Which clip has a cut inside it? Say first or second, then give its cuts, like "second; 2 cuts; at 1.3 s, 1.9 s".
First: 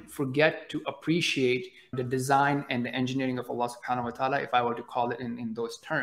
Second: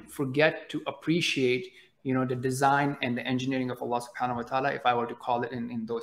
first; 1 cut; at 2.0 s